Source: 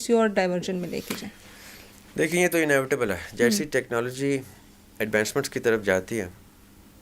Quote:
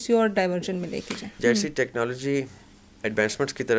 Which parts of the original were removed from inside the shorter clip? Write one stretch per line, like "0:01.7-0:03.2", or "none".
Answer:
0:01.3-0:03.3